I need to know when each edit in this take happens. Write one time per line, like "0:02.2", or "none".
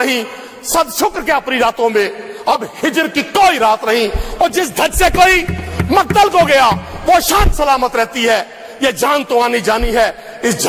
none